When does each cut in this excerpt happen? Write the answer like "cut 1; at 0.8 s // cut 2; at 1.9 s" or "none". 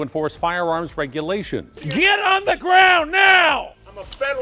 cut 1; at 1.8 s